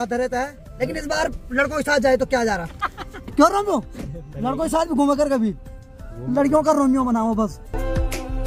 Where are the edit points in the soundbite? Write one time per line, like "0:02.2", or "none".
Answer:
none